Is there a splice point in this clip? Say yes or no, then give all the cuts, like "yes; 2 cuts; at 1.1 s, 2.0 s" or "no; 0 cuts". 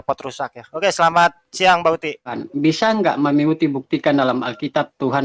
yes; 1 cut; at 2.4 s